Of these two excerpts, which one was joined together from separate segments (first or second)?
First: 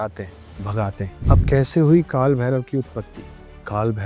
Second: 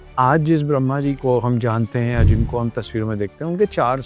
first